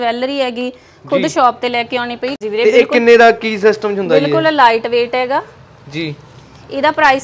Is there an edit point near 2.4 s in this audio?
yes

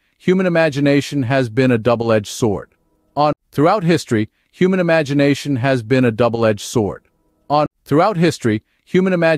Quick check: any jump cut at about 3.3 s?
yes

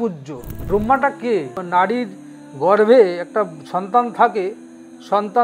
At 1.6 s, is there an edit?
yes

